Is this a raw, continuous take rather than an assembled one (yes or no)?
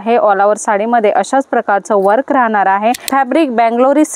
no